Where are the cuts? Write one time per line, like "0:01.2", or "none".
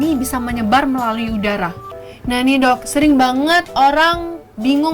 0:01.8